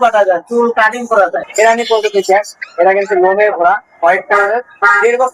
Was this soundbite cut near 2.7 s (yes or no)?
no